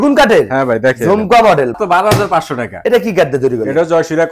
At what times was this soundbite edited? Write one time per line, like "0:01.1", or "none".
0:01.8
0:02.7